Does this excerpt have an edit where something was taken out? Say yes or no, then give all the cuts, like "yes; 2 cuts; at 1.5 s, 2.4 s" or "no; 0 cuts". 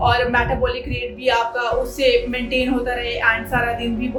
no; 0 cuts